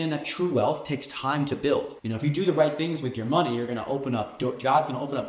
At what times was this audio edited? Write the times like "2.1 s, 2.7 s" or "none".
2.0 s